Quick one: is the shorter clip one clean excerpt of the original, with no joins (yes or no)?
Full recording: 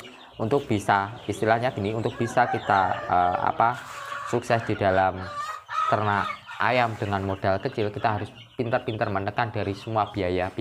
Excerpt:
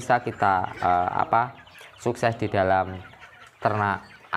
yes